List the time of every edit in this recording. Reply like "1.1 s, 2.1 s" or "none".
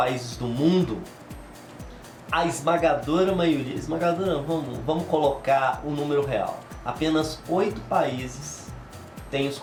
none

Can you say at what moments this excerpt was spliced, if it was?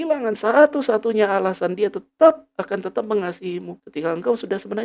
3.8 s

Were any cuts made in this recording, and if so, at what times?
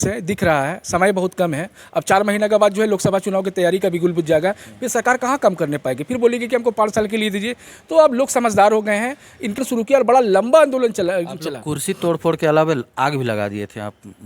9.6 s

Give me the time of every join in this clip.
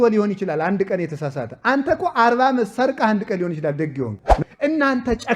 4.2 s

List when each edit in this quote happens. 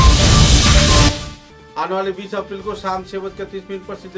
1.1 s

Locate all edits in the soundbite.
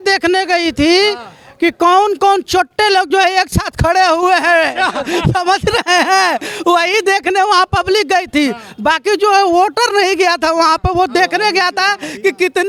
none

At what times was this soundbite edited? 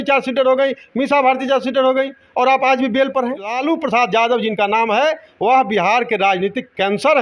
3.6 s

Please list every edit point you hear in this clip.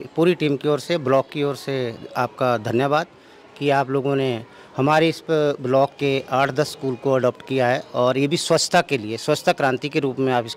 none

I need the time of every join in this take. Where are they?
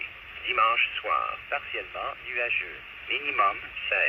1.4 s, 2.9 s

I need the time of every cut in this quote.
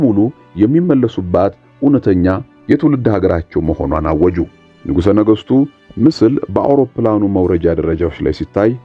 4.7 s

